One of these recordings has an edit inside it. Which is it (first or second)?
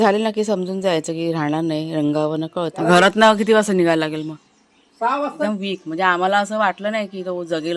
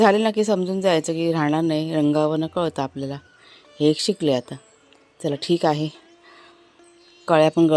first